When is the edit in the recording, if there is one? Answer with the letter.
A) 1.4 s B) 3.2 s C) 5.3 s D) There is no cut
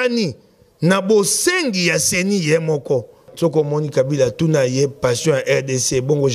B